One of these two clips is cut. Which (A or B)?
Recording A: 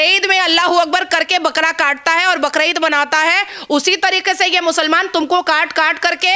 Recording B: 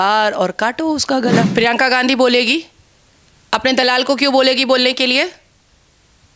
B